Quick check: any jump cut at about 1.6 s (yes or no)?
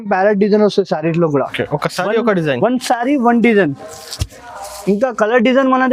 yes